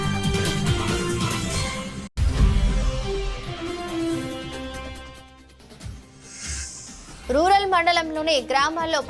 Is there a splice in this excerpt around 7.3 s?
yes; 3 cuts; at 2.1 s, 6.1 s, 7.3 s

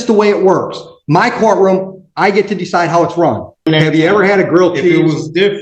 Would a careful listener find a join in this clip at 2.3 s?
no; 1 cut; at 3.7 s

